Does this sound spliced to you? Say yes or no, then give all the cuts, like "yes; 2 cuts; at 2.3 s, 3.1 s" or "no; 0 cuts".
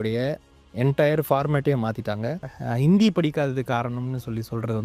yes; 1 cut; at 2.5 s